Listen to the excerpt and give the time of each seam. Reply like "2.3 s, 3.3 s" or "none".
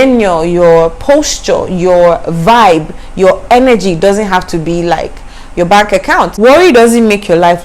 6.3 s